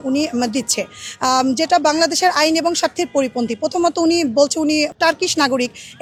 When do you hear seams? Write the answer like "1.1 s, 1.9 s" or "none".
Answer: none